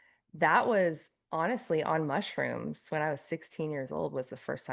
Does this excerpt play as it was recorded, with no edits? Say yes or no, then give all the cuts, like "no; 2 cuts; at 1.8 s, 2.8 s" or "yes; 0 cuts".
yes; 0 cuts